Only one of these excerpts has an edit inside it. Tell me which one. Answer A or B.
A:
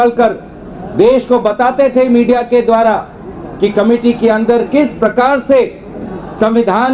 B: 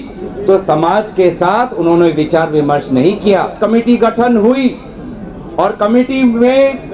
B